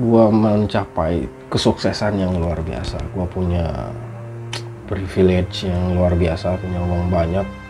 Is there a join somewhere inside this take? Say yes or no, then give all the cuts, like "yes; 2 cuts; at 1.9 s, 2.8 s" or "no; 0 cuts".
no; 0 cuts